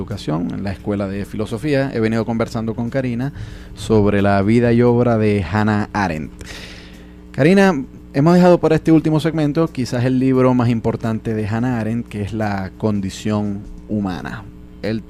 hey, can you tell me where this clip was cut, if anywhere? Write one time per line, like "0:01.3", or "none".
0:10.1